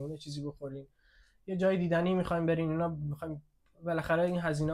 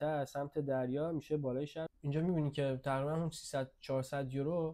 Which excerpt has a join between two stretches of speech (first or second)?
second